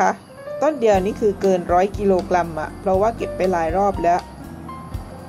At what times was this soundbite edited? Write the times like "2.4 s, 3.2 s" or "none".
none